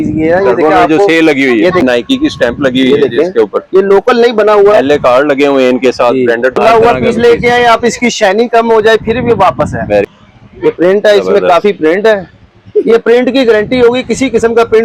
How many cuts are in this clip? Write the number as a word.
three